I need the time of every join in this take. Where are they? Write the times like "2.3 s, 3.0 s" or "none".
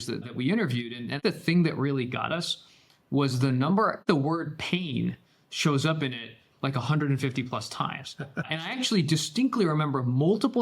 1.2 s, 4.0 s